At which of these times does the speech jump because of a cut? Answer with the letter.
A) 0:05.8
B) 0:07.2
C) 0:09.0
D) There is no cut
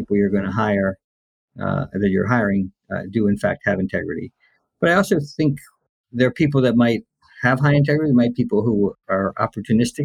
C